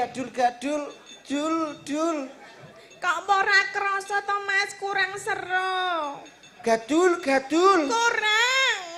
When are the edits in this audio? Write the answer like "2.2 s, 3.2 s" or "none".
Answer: none